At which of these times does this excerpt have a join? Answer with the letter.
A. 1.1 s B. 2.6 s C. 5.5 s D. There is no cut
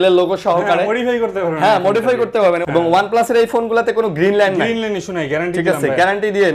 B